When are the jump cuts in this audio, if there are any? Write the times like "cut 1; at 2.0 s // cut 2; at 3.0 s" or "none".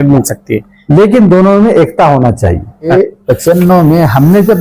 cut 1; at 2.9 s